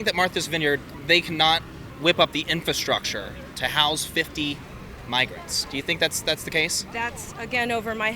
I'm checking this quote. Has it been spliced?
yes; 2 cuts; at 0.9 s, 1.8 s

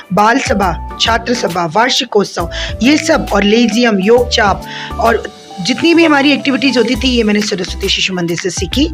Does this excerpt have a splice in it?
no; 0 cuts

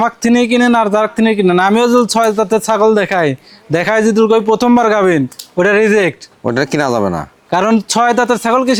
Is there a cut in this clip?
no; 0 cuts

